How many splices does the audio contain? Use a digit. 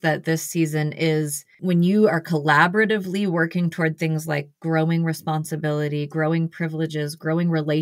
1